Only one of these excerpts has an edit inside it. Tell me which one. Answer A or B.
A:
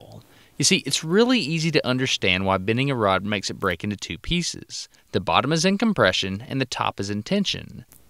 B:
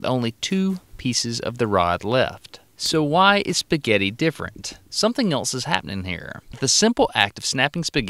A